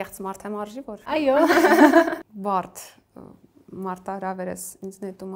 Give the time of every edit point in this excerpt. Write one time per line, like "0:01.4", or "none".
0:01.1
0:02.4